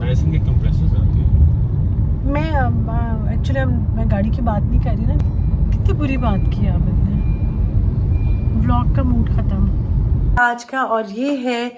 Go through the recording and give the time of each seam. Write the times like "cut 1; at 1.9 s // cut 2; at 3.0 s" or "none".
cut 1; at 5.2 s // cut 2; at 10.4 s